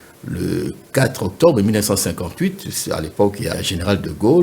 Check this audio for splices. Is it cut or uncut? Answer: cut